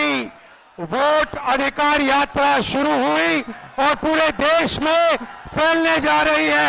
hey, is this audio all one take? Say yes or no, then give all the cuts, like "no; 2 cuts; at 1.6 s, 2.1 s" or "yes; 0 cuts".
yes; 0 cuts